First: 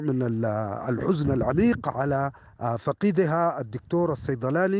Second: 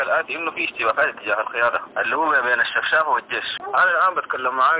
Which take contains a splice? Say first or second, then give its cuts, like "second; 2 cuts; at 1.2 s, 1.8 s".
second; 2 cuts; at 1.9 s, 3.5 s